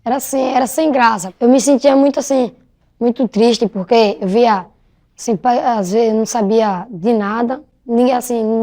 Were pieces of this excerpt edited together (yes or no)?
no